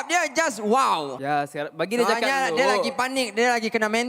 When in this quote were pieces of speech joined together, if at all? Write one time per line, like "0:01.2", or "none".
0:01.1